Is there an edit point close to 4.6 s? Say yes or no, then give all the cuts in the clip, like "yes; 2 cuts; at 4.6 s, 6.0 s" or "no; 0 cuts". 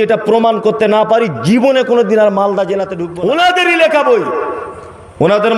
no; 1 cut; at 3.0 s